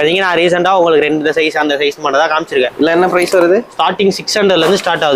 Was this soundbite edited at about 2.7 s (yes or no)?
yes